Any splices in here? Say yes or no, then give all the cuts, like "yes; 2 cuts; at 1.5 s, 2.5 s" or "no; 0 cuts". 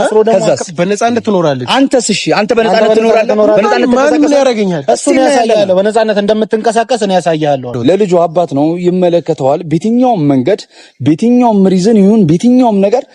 yes; 1 cut; at 7.7 s